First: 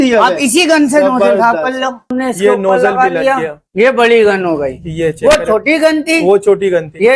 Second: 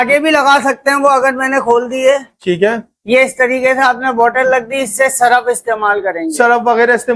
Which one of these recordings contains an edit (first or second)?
first